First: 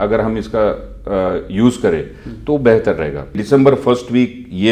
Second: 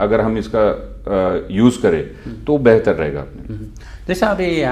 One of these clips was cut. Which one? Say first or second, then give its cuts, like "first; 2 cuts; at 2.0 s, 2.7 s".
first; 1 cut; at 3.4 s